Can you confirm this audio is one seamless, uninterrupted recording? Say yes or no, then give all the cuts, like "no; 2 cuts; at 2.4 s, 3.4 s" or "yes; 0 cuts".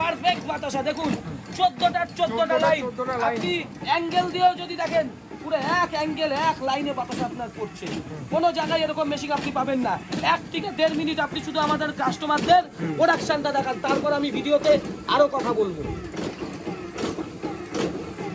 yes; 0 cuts